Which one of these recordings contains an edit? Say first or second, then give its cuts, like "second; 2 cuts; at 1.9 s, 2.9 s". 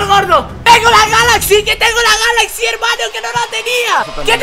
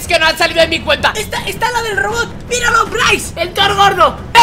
second; 1 cut; at 1.2 s